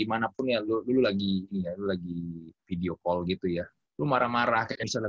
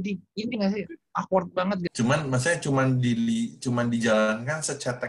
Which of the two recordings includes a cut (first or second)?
second